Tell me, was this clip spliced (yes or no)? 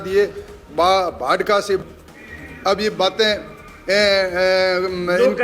yes